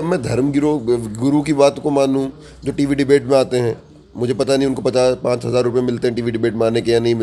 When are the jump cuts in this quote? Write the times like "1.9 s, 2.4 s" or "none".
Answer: none